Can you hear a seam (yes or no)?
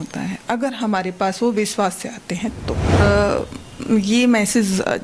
yes